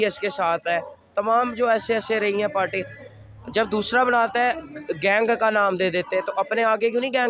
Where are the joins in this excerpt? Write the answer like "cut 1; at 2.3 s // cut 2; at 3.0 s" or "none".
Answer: none